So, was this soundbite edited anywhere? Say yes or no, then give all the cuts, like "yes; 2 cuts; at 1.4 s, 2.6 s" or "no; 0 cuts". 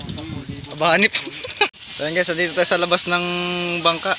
yes; 1 cut; at 1.8 s